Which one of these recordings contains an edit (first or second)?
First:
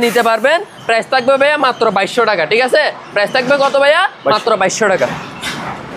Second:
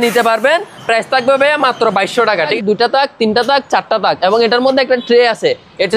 second